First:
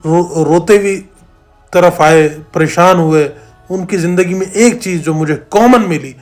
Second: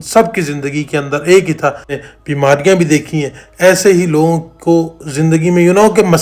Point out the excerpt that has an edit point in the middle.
second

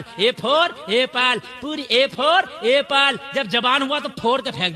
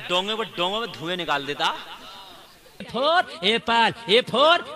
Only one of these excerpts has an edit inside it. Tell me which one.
second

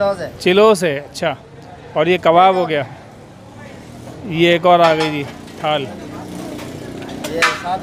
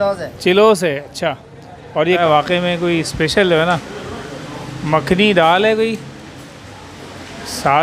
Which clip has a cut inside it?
second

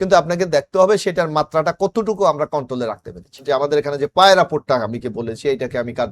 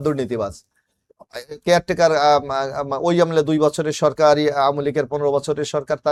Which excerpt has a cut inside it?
first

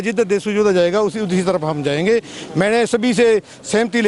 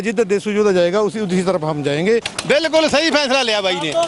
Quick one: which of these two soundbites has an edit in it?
second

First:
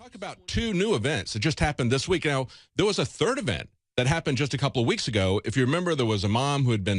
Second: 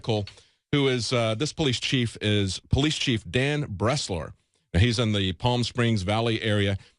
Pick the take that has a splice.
second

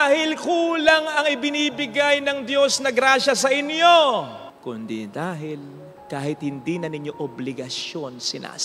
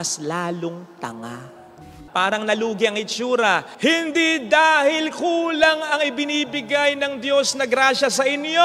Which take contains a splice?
second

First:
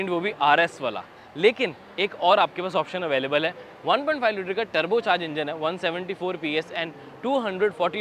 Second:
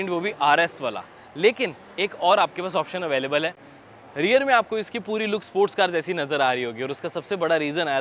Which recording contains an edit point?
second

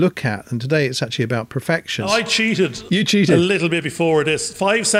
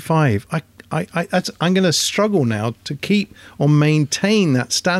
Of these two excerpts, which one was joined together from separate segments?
first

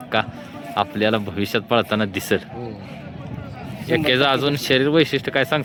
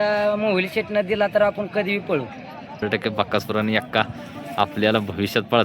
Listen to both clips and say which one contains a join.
second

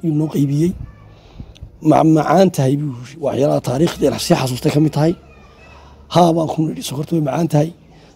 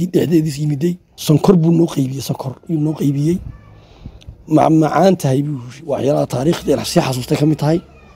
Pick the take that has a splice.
second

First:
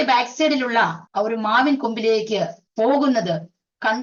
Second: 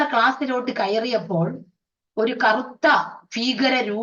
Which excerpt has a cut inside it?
first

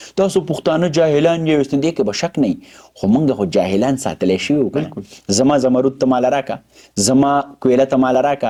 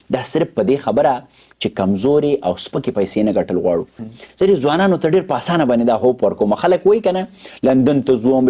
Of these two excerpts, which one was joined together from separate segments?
second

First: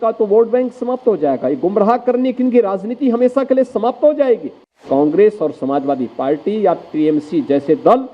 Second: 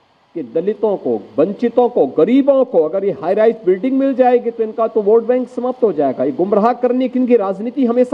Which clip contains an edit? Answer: first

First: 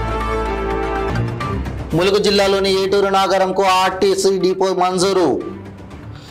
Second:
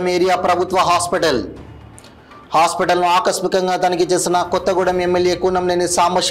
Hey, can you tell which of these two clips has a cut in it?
first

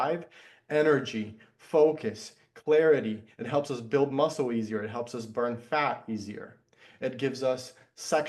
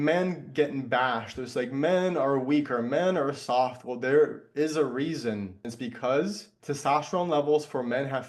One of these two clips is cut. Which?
second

